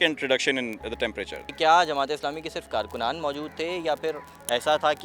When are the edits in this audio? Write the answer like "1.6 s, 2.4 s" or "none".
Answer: none

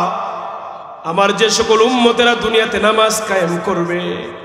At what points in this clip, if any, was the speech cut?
none

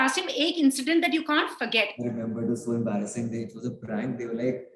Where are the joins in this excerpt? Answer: 1.9 s

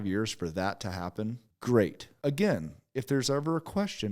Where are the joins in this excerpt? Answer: 1.5 s, 2.0 s

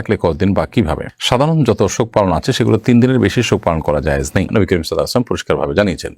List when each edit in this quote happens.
none

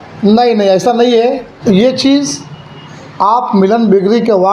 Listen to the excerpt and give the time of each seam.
1.5 s

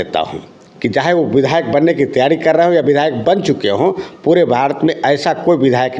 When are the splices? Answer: none

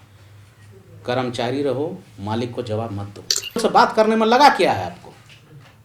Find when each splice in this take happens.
3.6 s

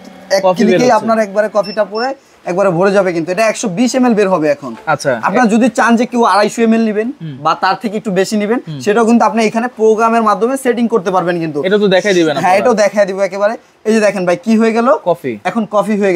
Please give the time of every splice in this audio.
none

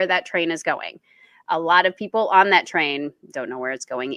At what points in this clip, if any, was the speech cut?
none

